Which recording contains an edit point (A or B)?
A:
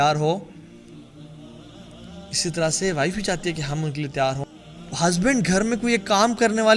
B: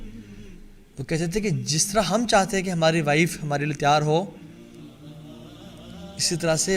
A